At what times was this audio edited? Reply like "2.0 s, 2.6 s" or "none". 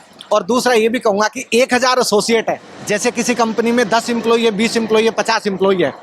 2.7 s